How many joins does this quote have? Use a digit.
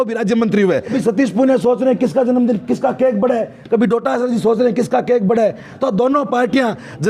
1